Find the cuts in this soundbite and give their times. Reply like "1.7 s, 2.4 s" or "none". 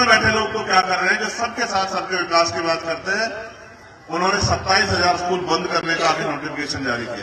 none